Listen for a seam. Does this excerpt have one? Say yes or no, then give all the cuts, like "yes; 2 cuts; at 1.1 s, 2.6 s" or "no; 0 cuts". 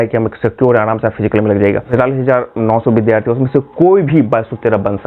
yes; 1 cut; at 1.9 s